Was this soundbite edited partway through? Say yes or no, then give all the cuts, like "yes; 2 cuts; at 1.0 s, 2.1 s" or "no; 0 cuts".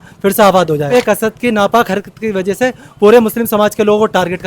yes; 1 cut; at 0.9 s